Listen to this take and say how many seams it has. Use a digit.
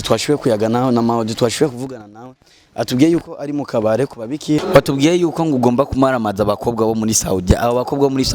1